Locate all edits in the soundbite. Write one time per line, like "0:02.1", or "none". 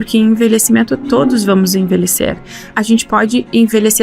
0:02.7